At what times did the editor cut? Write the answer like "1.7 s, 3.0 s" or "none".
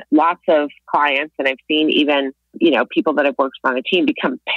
2.5 s